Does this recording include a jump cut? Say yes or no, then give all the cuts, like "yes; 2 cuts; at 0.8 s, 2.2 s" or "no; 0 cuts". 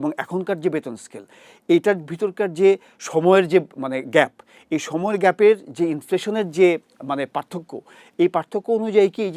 no; 0 cuts